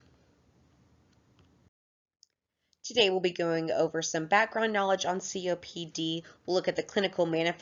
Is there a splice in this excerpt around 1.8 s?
no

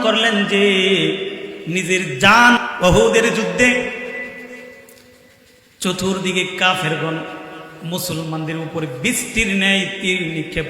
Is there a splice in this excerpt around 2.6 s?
yes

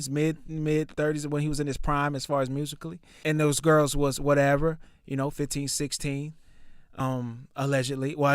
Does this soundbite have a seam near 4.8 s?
no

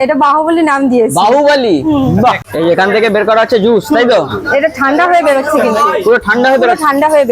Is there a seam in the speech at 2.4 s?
yes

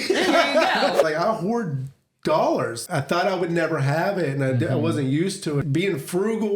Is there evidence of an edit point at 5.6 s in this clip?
yes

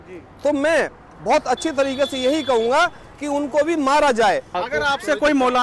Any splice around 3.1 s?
no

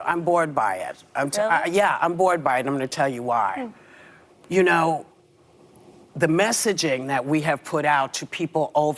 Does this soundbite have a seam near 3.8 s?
no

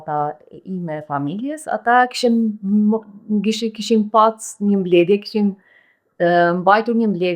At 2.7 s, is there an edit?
no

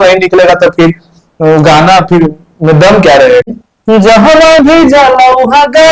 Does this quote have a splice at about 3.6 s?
yes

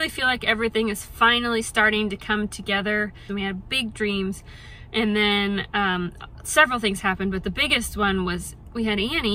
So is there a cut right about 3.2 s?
yes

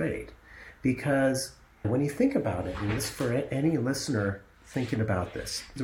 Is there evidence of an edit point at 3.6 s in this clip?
no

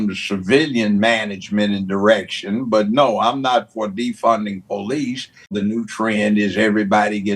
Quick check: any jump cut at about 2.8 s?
no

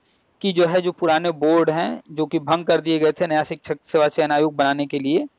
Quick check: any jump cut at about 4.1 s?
no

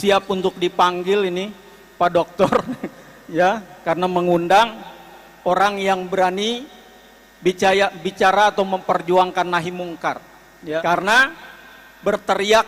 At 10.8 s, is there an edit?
yes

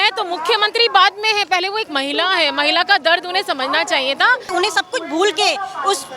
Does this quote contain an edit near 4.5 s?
yes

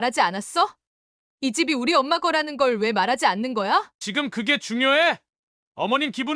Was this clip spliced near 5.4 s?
no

